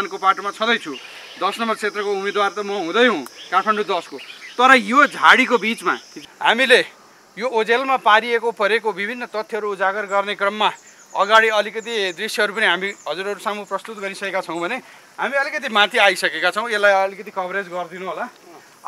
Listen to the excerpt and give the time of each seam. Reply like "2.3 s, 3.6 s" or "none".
6.2 s